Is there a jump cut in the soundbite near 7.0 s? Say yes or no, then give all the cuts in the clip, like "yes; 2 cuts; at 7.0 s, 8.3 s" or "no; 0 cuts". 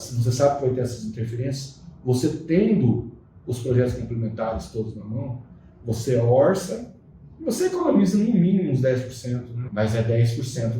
no; 1 cut; at 9.6 s